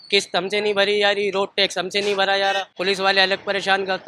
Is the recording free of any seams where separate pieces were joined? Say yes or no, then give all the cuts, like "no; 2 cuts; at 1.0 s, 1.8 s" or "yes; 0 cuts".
no; 1 cut; at 2.7 s